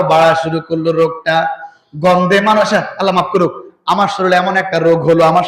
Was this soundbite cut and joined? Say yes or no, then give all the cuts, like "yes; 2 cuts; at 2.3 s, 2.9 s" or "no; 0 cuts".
no; 0 cuts